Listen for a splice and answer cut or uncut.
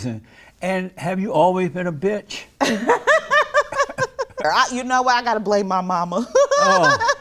cut